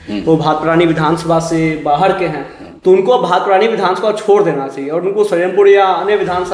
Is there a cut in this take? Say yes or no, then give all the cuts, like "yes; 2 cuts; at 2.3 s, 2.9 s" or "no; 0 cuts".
no; 0 cuts